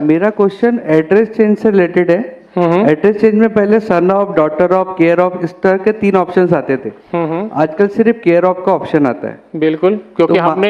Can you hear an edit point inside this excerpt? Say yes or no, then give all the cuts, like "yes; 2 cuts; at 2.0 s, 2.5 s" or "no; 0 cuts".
no; 0 cuts